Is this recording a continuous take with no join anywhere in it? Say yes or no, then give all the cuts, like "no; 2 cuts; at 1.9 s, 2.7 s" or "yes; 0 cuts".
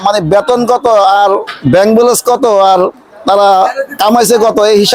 yes; 0 cuts